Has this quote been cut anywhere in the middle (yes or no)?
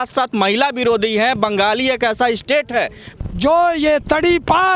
yes